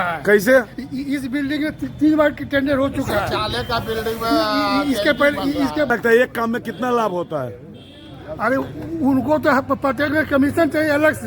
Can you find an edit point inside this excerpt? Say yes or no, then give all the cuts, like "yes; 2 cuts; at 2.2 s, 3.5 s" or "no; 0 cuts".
yes; 1 cut; at 5.9 s